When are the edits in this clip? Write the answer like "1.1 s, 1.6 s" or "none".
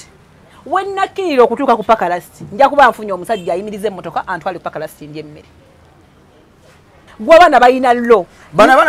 7.0 s